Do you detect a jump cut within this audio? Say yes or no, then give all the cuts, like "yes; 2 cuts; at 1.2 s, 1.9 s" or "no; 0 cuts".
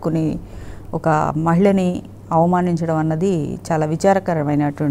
no; 0 cuts